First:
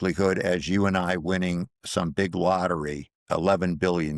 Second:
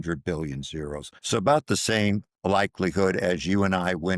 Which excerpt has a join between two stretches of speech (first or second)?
second